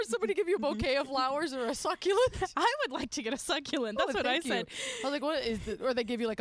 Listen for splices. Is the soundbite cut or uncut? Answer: uncut